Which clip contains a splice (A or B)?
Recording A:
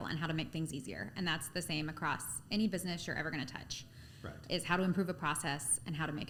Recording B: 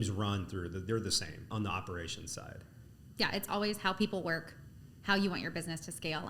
B